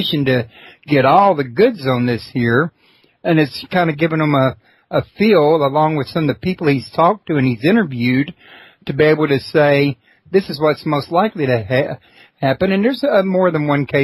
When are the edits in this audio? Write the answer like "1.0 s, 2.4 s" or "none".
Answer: none